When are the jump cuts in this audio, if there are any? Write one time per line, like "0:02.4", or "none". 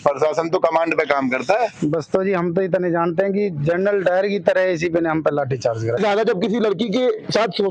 0:06.0